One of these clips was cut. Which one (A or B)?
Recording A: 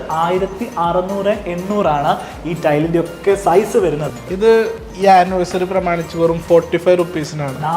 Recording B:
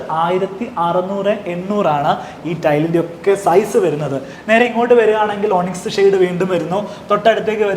A